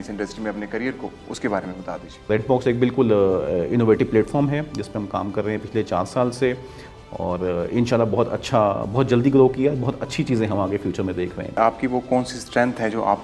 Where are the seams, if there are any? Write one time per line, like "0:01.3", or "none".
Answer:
0:02.3
0:11.6